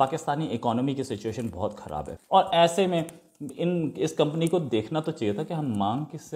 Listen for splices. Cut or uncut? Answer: cut